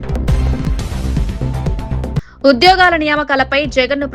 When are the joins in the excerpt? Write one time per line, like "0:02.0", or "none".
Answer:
0:02.3